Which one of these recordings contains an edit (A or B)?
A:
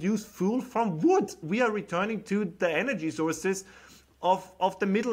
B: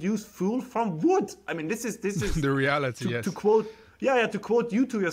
A